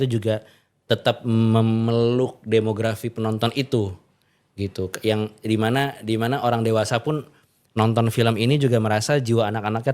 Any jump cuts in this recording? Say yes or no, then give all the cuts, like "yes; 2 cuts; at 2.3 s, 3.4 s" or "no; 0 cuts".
no; 0 cuts